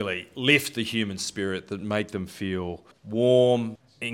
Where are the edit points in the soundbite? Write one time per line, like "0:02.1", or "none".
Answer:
none